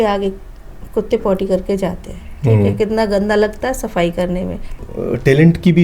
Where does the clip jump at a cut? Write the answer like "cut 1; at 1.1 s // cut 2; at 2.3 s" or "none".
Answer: cut 1; at 4.7 s